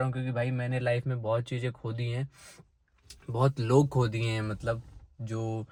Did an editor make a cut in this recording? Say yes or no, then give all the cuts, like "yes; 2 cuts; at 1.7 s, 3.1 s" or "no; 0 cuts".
no; 0 cuts